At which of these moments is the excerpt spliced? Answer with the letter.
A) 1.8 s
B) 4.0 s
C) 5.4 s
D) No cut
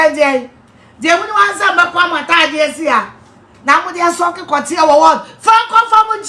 D